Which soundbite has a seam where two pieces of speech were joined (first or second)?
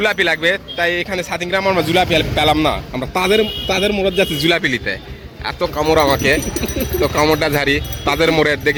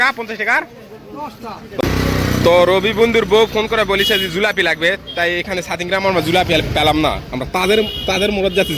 second